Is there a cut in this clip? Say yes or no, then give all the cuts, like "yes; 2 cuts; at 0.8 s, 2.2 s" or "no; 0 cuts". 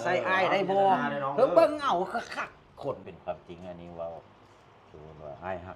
yes; 1 cut; at 3.1 s